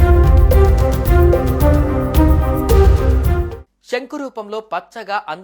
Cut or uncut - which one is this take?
cut